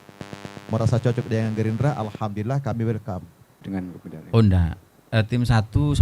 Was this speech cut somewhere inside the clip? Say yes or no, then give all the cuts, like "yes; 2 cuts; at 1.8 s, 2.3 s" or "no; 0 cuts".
yes; 1 cut; at 3.7 s